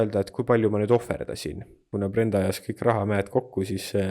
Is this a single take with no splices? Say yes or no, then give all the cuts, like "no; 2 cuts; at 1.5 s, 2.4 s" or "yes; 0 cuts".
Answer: no; 1 cut; at 1.9 s